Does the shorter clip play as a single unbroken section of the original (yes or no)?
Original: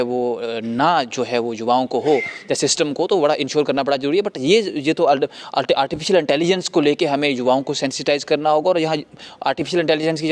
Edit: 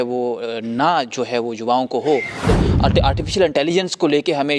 no